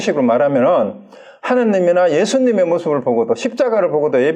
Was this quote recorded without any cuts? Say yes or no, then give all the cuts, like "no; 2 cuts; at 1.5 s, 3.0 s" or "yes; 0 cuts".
yes; 0 cuts